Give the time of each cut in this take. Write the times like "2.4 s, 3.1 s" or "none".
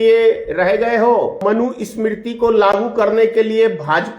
1.4 s